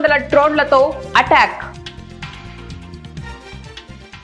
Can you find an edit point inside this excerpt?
yes; 1 cut; at 1.7 s

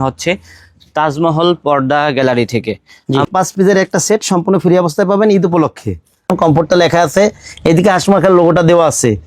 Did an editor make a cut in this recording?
yes; 2 cuts; at 3.3 s, 6.3 s

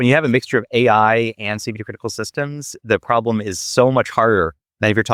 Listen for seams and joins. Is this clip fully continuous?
yes; 0 cuts

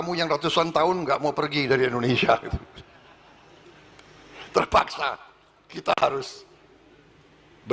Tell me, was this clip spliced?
no; 0 cuts

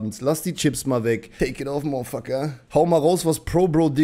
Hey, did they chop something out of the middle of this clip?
yes; 2 cuts; at 1.3 s, 2.6 s

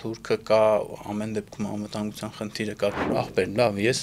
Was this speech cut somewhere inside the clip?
yes; 1 cut; at 3.1 s

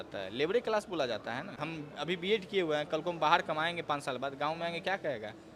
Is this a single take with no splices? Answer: no; 1 cut; at 1.6 s

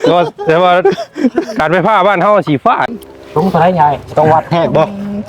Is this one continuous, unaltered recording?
no; 1 cut; at 2.8 s

